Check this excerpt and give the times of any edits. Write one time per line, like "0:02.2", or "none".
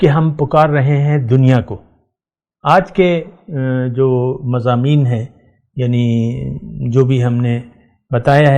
none